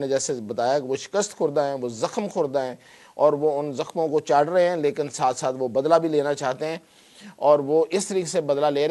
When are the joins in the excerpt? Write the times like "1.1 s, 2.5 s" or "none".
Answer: none